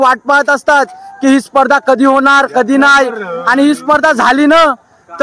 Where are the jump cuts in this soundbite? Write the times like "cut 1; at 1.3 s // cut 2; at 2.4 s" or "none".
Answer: none

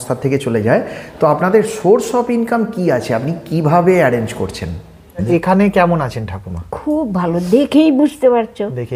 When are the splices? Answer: cut 1; at 5.2 s

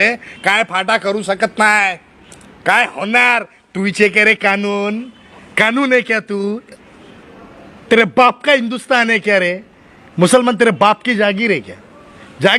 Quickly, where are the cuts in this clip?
none

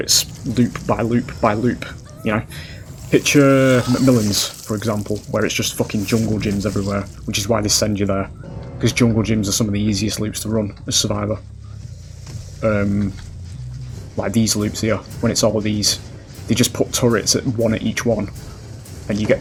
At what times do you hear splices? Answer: none

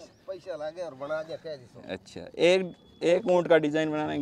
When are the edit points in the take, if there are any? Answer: none

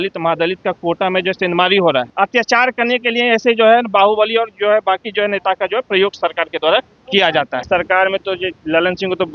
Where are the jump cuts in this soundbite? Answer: cut 1; at 2.1 s // cut 2; at 7.6 s

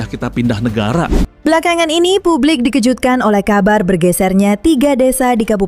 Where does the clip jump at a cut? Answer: cut 1; at 1.3 s

